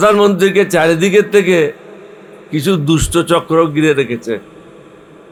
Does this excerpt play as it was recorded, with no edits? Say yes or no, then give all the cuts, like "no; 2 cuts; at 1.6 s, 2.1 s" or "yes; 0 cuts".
yes; 0 cuts